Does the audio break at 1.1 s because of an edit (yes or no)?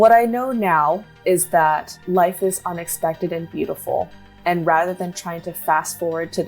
yes